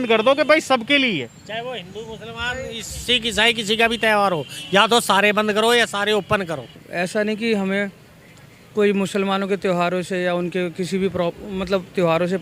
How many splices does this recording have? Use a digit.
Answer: 1